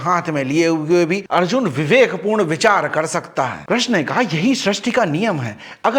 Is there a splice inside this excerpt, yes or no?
yes